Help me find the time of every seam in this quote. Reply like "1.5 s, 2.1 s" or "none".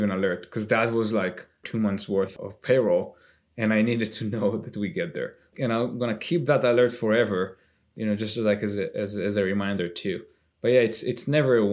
1.6 s, 2.3 s, 5.5 s